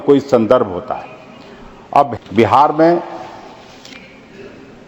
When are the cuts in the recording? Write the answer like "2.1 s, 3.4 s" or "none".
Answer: 2.1 s